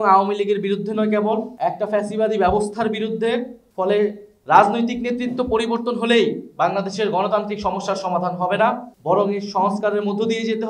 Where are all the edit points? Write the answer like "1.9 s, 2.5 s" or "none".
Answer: none